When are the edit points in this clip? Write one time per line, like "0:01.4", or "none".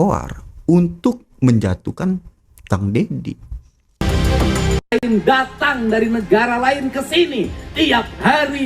0:04.0